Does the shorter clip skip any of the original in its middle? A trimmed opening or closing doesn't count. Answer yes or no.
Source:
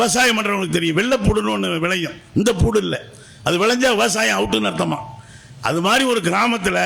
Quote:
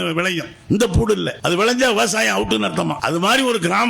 yes